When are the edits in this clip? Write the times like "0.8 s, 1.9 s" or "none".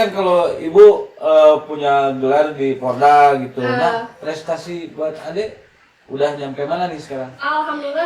none